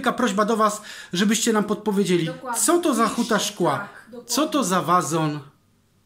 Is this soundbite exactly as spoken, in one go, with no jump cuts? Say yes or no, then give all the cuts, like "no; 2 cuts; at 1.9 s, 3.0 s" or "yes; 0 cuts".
yes; 0 cuts